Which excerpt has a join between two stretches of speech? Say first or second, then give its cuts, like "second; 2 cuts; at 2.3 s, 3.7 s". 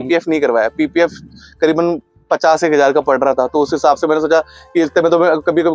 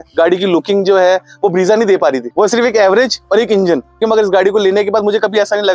second; 2 cuts; at 2.2 s, 4.0 s